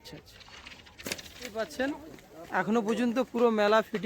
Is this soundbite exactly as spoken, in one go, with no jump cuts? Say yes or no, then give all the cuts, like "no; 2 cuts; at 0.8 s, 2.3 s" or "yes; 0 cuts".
no; 1 cut; at 1.5 s